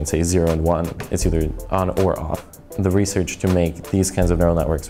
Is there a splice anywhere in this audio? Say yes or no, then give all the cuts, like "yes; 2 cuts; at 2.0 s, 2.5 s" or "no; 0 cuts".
yes; 1 cut; at 2.6 s